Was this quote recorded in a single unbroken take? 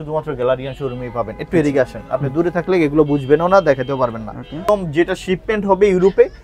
no; 1 cut; at 4.7 s

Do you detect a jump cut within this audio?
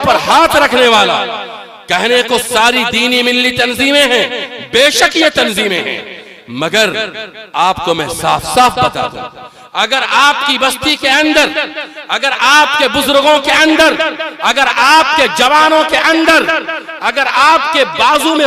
no; 0 cuts

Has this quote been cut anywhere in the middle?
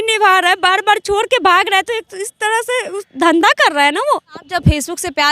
yes; 1 cut; at 4.4 s

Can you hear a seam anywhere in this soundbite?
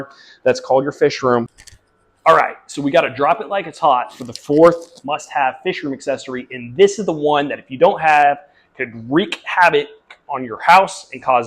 yes; 1 cut; at 1.4 s

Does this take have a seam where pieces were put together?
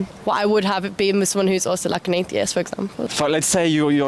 yes; 1 cut; at 3.0 s

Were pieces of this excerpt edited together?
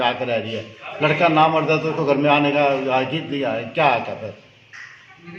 no; 0 cuts

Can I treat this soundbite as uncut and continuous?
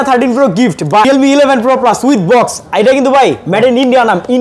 no; 1 cut; at 1.0 s

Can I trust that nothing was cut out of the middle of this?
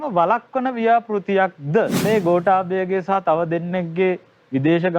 no; 1 cut; at 2.0 s

